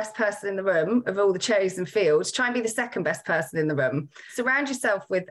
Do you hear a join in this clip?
yes; 1 cut; at 4.3 s

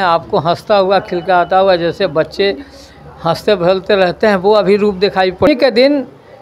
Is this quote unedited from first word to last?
no; 1 cut; at 5.5 s

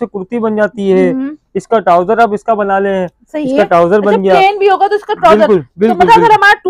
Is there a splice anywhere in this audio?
no; 0 cuts

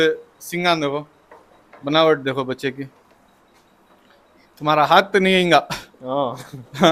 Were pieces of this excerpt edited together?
no; 0 cuts

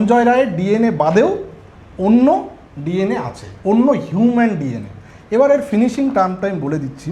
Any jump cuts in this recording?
no; 0 cuts

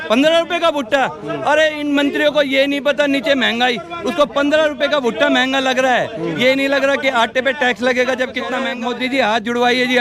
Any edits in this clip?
yes; 1 cut; at 8.7 s

